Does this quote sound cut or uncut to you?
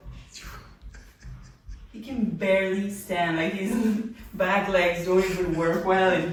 uncut